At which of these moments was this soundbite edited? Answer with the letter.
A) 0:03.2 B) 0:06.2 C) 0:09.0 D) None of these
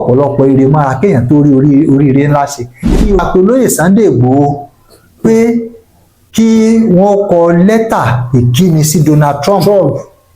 A